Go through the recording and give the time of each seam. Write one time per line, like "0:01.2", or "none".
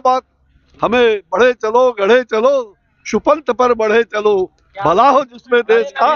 none